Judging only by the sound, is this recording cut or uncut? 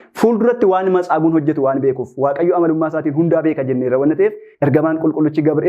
cut